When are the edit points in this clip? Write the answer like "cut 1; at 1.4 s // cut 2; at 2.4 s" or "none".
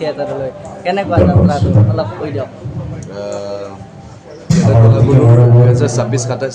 none